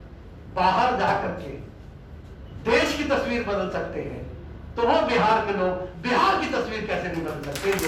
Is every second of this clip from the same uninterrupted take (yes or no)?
yes